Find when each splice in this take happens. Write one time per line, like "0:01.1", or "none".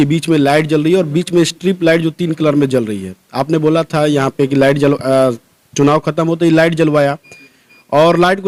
none